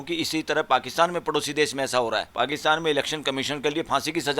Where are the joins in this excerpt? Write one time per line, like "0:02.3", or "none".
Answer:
0:02.3